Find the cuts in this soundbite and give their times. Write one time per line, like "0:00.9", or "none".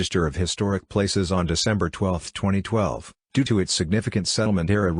0:03.6